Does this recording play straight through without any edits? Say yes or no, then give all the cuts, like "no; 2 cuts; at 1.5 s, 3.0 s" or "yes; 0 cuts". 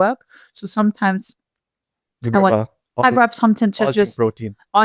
yes; 0 cuts